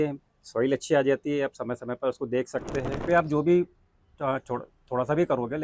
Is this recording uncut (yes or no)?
no